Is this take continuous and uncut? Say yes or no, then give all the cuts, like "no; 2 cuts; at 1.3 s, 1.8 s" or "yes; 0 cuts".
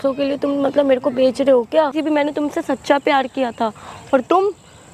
no; 1 cut; at 2.0 s